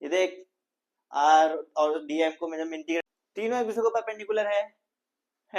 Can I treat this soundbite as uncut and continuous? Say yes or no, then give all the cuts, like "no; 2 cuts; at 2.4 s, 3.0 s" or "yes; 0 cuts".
no; 1 cut; at 3.1 s